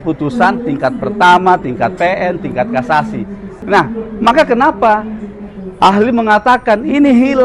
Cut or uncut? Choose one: cut